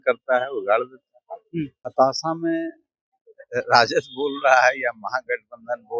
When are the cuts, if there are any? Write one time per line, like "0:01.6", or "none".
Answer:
0:01.8